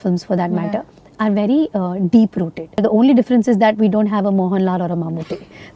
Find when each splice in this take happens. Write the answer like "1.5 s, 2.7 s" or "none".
2.8 s